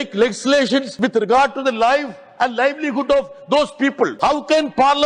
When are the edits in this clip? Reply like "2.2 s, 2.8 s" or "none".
0.9 s, 4.1 s